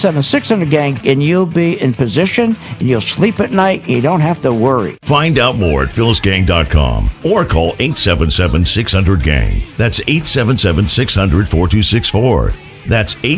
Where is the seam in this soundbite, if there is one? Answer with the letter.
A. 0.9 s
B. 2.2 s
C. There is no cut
A